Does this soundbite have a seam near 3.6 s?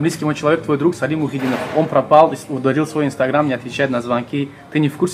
no; 0 cuts

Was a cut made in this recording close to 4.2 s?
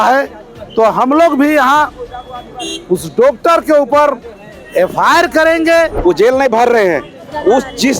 no; 1 cut; at 5.9 s

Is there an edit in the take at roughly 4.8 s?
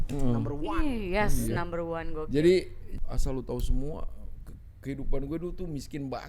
no; 1 cut; at 2.8 s

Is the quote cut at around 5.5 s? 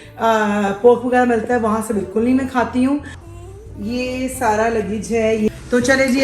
yes; 2 cuts; at 3.2 s, 5.5 s

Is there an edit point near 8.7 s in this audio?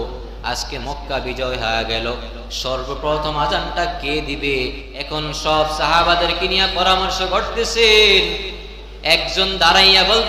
no; 1 cut; at 4.9 s

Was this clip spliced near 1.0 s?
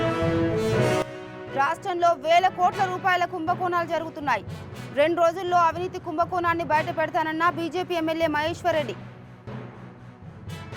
yes; 1 cut; at 1.0 s

